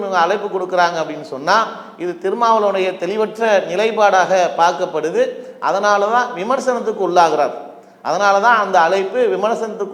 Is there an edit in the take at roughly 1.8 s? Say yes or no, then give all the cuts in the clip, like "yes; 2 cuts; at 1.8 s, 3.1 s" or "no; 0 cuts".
no; 0 cuts